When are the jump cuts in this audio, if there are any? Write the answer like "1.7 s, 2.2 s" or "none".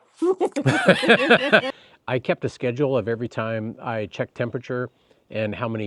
1.7 s